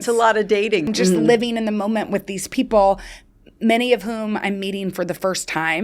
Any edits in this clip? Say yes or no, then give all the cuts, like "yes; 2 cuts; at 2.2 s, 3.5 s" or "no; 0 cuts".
yes; 1 cut; at 0.9 s